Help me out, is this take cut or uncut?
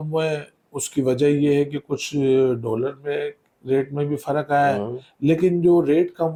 uncut